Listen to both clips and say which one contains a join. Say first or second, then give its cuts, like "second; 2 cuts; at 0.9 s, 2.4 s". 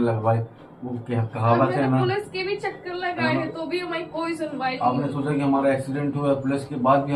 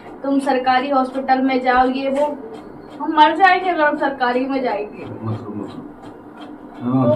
second; 1 cut; at 5.1 s